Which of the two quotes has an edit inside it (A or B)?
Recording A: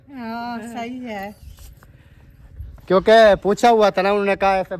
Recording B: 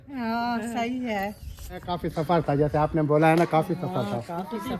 B